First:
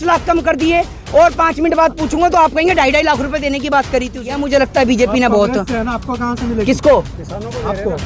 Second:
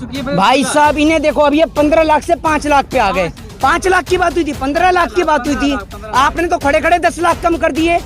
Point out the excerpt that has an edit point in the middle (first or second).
first